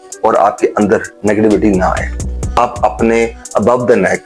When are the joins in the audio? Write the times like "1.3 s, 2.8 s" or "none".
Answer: 2.6 s